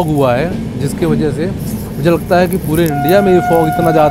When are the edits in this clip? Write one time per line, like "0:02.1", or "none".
none